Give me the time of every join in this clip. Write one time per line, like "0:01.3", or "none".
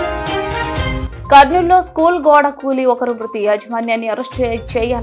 none